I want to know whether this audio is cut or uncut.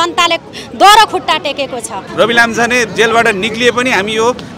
cut